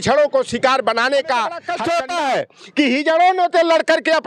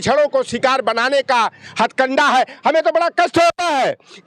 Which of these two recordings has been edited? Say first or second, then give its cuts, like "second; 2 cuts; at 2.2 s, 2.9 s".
first; 1 cut; at 1.7 s